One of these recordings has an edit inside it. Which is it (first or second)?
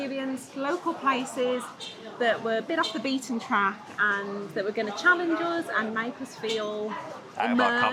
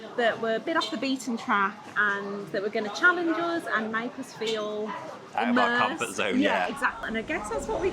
second